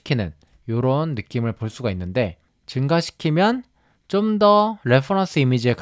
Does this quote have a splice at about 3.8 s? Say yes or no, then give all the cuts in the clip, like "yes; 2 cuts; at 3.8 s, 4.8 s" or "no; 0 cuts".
no; 1 cut; at 2.5 s